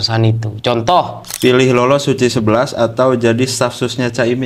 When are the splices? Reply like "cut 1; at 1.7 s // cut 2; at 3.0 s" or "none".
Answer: cut 1; at 1.2 s